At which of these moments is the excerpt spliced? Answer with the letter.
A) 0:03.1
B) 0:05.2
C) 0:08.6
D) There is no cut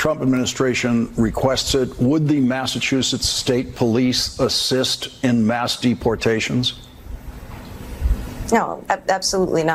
D